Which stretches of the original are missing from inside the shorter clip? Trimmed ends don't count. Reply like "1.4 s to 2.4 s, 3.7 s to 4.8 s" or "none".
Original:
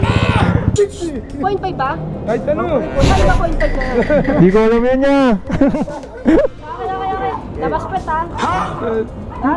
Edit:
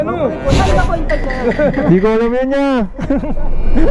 none